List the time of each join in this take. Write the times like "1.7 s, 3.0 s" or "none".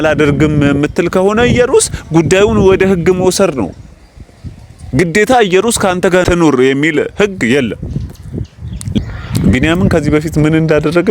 6.2 s, 9.0 s